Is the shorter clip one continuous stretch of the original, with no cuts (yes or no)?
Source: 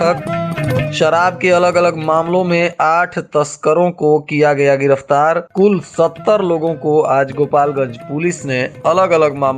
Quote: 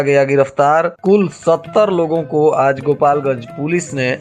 yes